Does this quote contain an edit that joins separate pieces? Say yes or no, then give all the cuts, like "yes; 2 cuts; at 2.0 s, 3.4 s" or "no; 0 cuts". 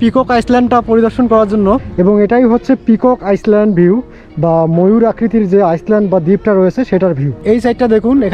yes; 2 cuts; at 1.9 s, 7.4 s